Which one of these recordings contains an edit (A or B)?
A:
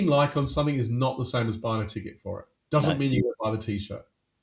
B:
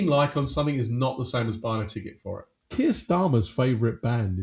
B